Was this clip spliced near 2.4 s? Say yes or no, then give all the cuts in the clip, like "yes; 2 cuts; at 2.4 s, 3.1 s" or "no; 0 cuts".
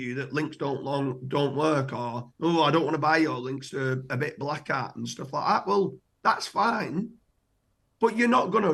no; 0 cuts